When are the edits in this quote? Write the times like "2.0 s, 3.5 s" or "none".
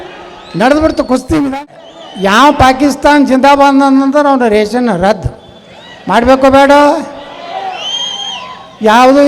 1.8 s